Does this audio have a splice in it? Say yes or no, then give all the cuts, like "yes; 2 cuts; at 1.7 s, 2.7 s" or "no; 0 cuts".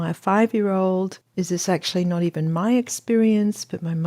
yes; 1 cut; at 1.2 s